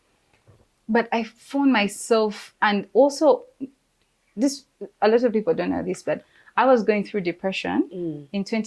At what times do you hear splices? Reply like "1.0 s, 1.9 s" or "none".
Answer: none